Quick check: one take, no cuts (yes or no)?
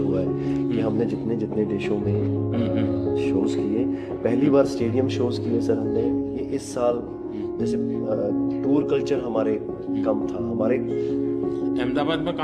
no